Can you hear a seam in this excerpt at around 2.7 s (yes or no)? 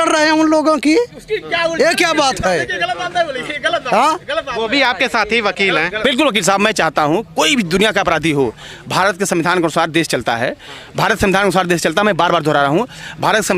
no